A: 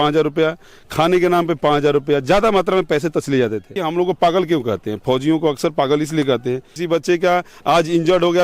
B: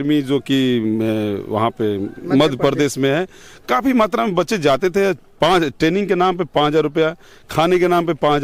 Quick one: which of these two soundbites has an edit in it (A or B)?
A